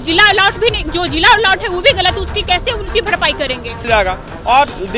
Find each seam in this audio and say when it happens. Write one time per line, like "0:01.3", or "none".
0:03.9